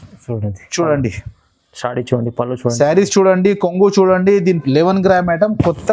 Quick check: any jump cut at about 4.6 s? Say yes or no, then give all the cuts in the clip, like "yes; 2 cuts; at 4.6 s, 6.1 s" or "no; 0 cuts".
yes; 1 cut; at 4.6 s